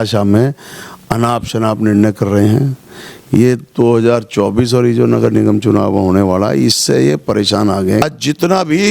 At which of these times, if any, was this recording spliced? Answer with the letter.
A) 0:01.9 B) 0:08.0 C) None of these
B